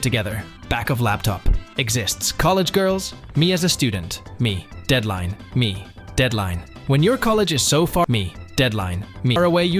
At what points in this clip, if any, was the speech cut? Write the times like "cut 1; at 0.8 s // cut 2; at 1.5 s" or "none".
none